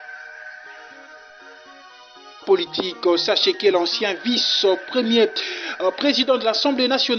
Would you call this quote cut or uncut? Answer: uncut